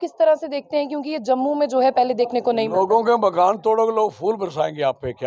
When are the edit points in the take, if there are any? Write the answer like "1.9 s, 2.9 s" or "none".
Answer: none